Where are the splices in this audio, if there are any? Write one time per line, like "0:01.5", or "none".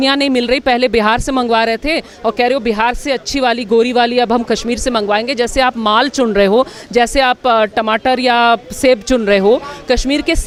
none